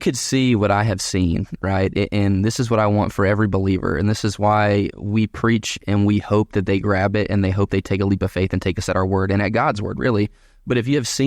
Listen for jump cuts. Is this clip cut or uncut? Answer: uncut